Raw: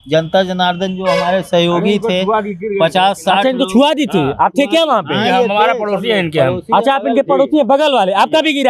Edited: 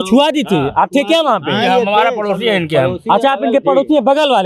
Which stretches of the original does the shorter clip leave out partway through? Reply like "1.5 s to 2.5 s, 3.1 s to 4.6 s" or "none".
none